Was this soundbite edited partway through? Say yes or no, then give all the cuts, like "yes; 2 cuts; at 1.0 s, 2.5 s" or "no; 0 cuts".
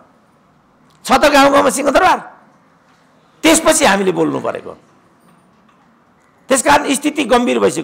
no; 0 cuts